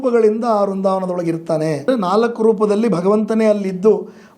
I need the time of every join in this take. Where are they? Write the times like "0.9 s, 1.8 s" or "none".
1.9 s

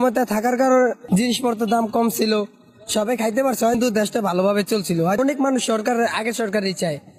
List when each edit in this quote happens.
none

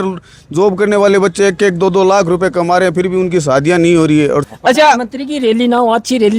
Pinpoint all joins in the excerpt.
4.5 s

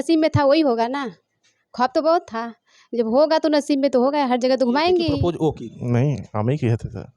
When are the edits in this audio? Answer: 5.2 s

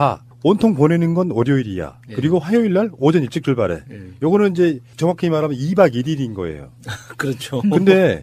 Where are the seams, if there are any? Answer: 1.0 s

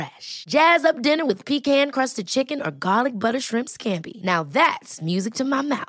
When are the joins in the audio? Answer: none

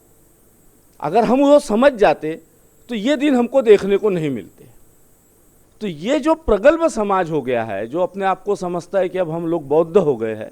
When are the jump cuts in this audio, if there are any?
5.6 s

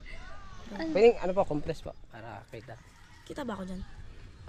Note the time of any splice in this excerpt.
none

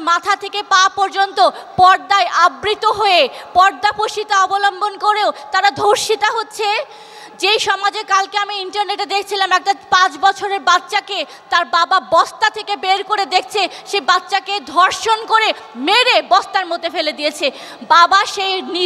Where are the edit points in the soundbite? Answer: none

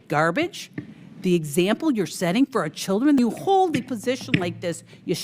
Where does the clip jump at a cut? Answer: 3.2 s

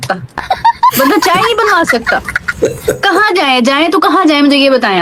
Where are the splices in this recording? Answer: none

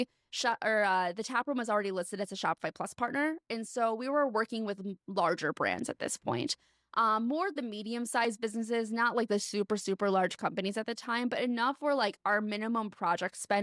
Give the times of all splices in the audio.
none

